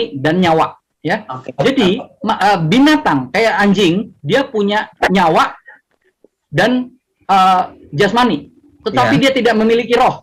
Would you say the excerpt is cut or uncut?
uncut